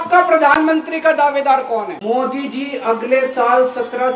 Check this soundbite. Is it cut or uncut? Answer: cut